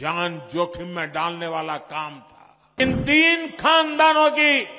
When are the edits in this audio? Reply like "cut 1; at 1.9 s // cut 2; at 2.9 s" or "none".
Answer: cut 1; at 2.8 s